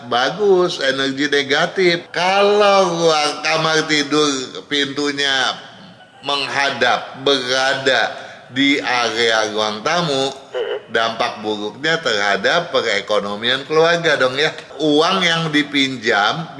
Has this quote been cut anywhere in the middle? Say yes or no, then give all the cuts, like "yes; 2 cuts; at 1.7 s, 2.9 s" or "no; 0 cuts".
yes; 2 cuts; at 2.0 s, 14.7 s